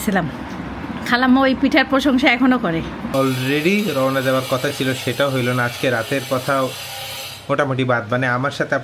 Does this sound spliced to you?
yes; 1 cut; at 3.0 s

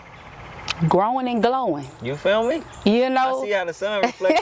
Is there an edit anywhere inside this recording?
no; 0 cuts

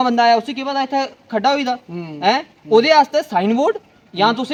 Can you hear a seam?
no; 0 cuts

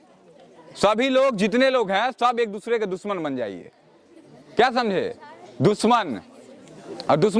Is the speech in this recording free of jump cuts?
yes; 0 cuts

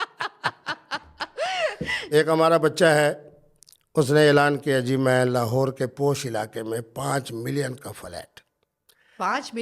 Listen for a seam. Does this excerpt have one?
yes; 1 cut; at 2.0 s

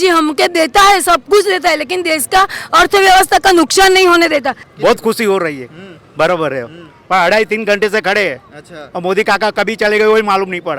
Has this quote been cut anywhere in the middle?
yes; 1 cut; at 4.6 s

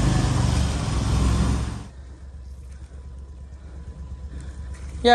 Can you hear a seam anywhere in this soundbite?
yes; 1 cut; at 1.7 s

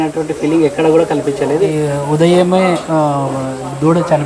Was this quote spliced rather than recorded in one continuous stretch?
yes; 1 cut; at 1.7 s

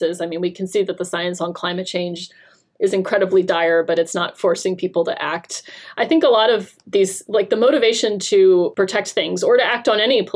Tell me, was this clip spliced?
yes; 1 cut; at 8.7 s

